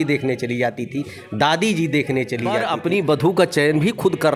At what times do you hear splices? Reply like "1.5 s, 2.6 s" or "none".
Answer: 2.7 s